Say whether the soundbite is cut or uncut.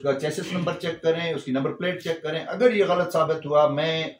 uncut